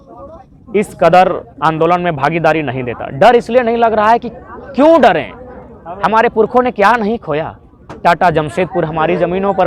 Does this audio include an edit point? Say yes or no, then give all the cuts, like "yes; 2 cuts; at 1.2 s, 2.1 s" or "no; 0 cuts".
no; 0 cuts